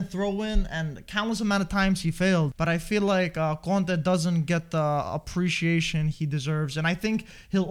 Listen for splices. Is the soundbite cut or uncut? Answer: cut